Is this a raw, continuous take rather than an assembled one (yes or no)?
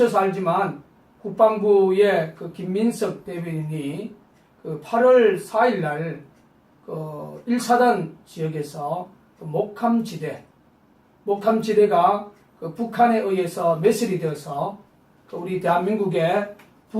no